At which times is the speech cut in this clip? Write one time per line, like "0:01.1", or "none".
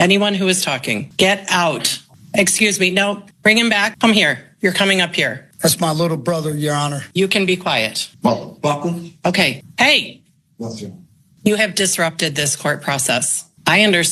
none